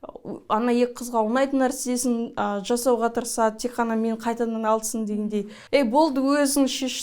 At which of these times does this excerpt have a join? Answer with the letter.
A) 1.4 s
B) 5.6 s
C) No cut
B